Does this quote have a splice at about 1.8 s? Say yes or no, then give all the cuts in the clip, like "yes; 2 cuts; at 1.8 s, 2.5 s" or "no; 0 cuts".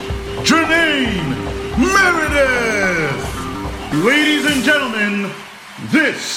no; 1 cut; at 3.9 s